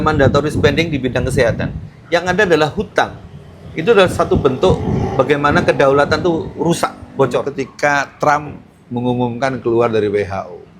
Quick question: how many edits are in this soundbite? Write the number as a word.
one